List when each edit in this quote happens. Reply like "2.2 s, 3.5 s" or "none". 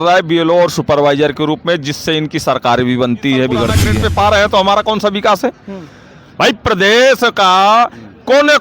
4.0 s